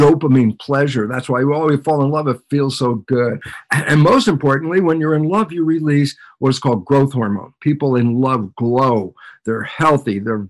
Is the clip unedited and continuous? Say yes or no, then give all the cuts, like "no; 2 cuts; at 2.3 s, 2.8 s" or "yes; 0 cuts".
no; 2 cuts; at 3.5 s, 7.5 s